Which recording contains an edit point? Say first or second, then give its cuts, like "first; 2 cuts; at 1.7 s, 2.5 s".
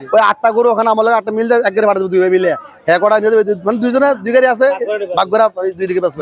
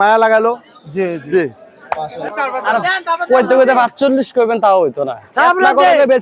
second; 1 cut; at 2.3 s